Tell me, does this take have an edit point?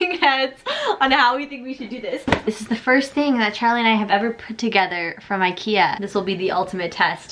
yes; 2 cuts; at 2.5 s, 6.0 s

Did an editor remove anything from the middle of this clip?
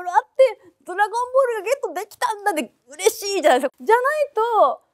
yes; 1 cut; at 3.7 s

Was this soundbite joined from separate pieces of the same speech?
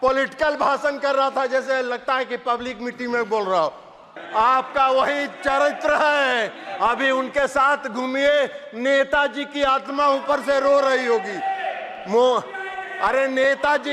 yes; 1 cut; at 4.1 s

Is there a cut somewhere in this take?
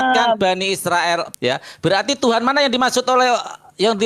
yes; 1 cut; at 1.3 s

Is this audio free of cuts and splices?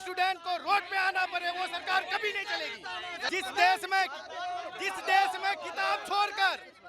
no; 1 cut; at 3.3 s

